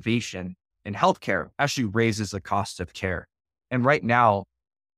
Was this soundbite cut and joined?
yes; 1 cut; at 1.5 s

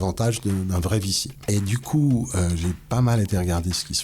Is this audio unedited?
no; 1 cut; at 1.3 s

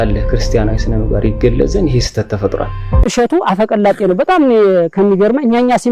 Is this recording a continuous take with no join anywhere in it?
no; 1 cut; at 3.0 s

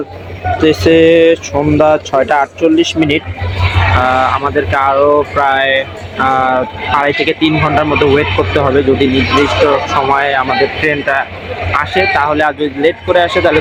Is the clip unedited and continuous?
yes; 0 cuts

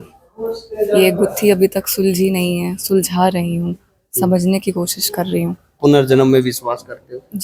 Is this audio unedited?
no; 1 cut; at 5.8 s

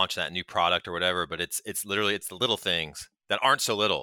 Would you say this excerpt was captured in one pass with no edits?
yes; 0 cuts

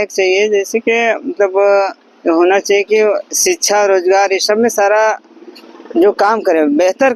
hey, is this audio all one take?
yes; 0 cuts

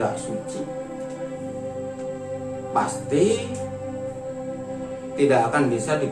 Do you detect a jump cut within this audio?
yes; 2 cuts; at 3.5 s, 5.1 s

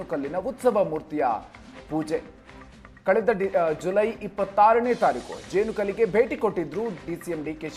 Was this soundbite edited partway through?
no; 0 cuts

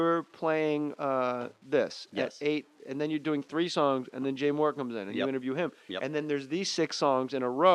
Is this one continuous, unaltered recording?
no; 1 cut; at 5.5 s

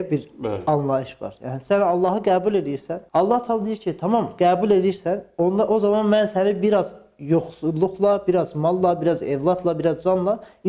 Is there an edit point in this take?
no; 0 cuts

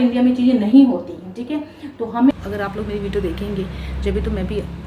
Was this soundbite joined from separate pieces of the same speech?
yes; 1 cut; at 2.3 s

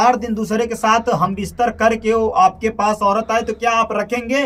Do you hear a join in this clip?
no; 0 cuts

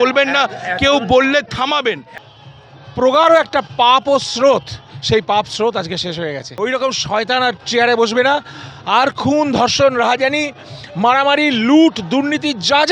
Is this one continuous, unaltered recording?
no; 2 cuts; at 2.1 s, 6.5 s

